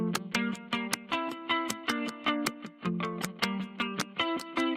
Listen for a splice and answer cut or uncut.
uncut